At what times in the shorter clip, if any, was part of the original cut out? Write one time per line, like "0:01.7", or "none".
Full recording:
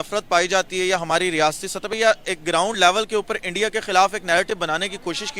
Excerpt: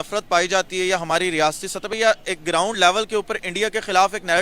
none

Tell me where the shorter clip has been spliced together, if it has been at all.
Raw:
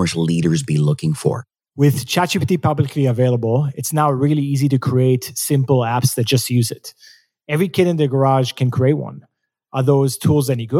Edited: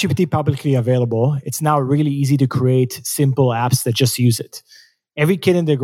none

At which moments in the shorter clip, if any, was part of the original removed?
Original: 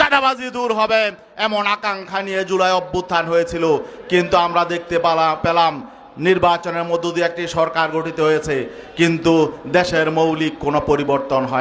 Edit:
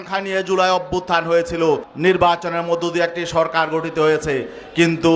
0:01.9

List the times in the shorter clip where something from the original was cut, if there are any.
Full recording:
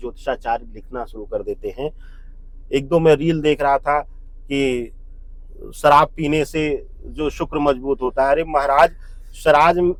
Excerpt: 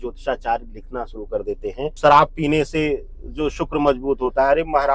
0:01.9

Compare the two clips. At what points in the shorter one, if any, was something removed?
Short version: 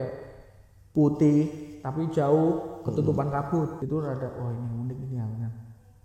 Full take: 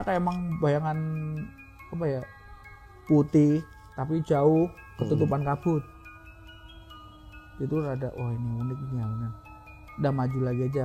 0:03.7

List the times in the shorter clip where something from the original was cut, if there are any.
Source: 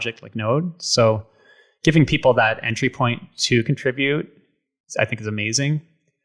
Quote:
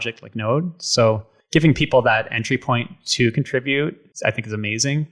0:01.3
0:04.1

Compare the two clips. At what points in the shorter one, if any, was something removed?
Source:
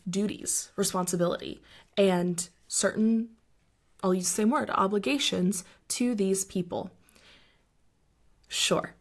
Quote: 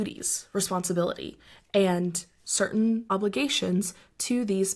0:03.1

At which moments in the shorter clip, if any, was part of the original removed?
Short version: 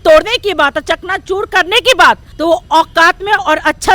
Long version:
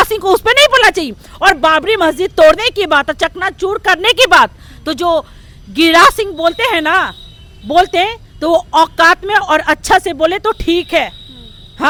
0:02.3

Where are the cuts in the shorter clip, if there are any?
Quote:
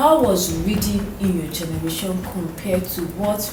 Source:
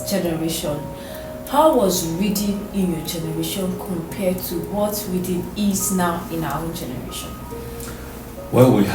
none

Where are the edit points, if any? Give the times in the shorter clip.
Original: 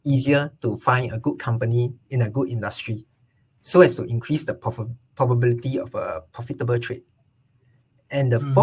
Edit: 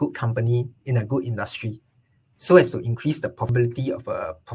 0:03.5

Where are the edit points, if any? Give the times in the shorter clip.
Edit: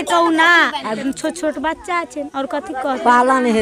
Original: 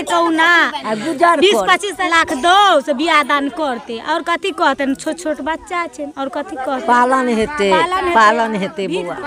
0:01.0

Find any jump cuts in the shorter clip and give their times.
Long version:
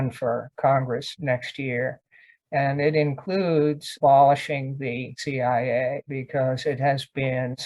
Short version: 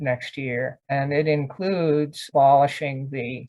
0:00.9

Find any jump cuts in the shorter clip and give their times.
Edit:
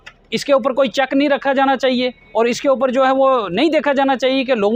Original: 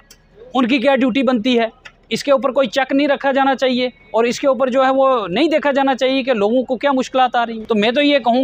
none

